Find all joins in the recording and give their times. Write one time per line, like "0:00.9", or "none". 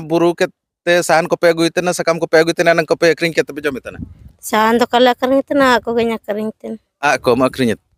none